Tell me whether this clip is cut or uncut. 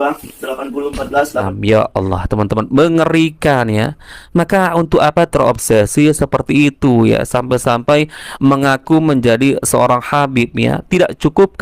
cut